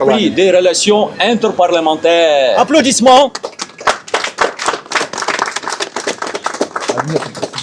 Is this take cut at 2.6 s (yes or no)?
yes